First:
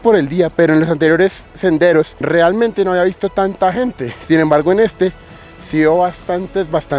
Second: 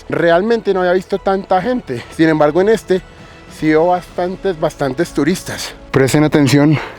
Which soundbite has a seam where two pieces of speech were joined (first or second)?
second